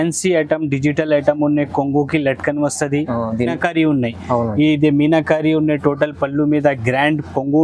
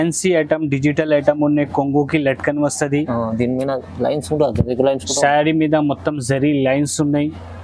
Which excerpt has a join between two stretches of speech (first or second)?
first